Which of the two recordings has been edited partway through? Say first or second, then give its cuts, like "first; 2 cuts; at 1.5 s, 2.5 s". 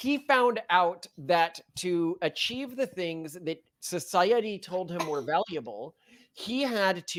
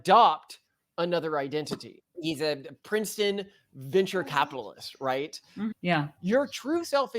second; 1 cut; at 5.7 s